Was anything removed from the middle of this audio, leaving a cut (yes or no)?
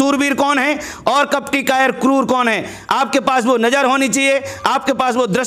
no